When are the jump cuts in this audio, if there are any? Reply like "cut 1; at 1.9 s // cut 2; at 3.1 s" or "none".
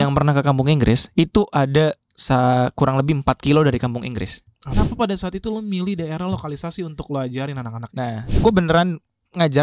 cut 1; at 4.6 s // cut 2; at 8.4 s